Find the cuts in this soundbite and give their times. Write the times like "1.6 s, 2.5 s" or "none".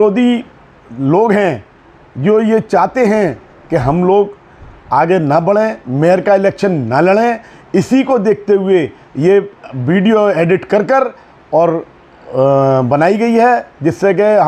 none